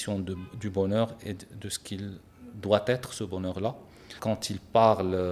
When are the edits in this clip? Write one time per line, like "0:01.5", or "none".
0:04.1